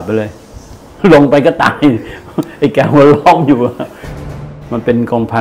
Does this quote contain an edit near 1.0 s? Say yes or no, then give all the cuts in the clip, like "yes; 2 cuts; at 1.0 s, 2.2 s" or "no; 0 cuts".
yes; 2 cuts; at 1.0 s, 4.1 s